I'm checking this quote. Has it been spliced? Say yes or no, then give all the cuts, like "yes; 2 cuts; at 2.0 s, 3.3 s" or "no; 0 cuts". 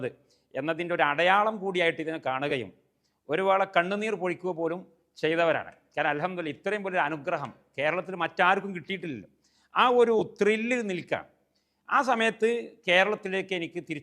no; 0 cuts